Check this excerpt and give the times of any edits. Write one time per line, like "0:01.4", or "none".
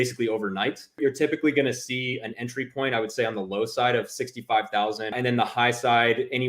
0:01.0
0:05.2